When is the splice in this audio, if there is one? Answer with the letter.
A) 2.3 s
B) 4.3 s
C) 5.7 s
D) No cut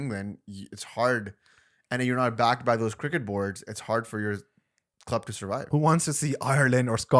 C